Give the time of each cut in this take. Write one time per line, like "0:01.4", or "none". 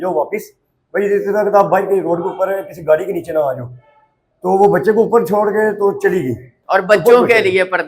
0:06.5